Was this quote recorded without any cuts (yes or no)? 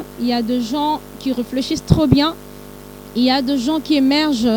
yes